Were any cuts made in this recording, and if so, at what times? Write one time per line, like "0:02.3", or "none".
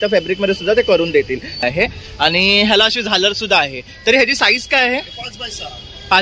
0:01.6